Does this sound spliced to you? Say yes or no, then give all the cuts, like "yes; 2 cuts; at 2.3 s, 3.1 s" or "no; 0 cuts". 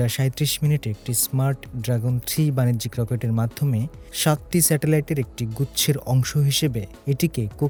no; 0 cuts